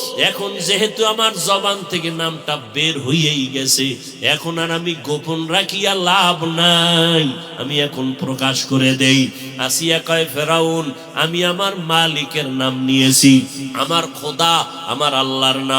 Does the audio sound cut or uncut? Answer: cut